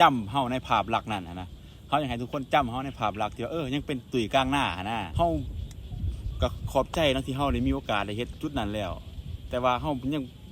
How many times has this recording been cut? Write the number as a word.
one